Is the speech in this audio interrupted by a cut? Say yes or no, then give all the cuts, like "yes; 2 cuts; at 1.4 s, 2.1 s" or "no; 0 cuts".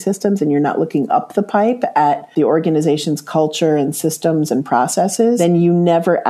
yes; 1 cut; at 5.4 s